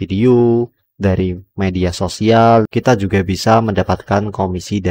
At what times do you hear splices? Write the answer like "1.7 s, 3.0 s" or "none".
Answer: 2.7 s